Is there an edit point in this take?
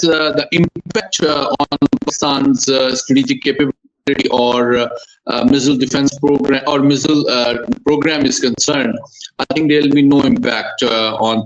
no; 0 cuts

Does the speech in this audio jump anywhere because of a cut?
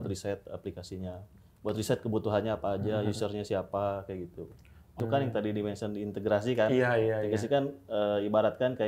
yes; 1 cut; at 5.0 s

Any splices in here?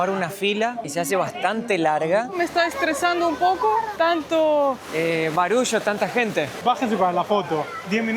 yes; 5 cuts; at 0.8 s, 2.4 s, 3.9 s, 4.8 s, 6.6 s

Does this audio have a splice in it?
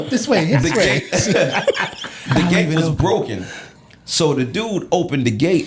no; 0 cuts

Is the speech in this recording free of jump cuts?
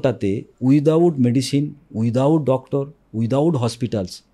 yes; 0 cuts

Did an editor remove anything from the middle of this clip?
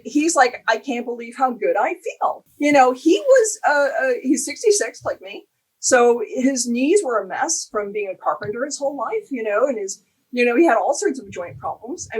yes; 1 cut; at 2.4 s

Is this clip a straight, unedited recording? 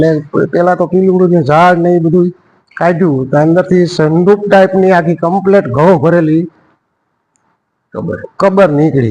yes; 0 cuts

